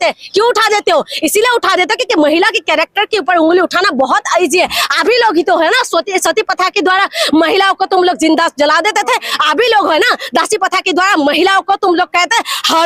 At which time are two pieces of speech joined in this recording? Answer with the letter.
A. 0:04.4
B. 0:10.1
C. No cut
C